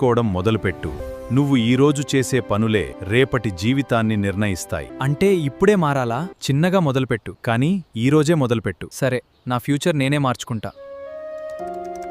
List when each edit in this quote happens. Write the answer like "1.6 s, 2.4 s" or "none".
1.1 s, 3.0 s, 4.9 s, 6.3 s, 7.3 s, 8.9 s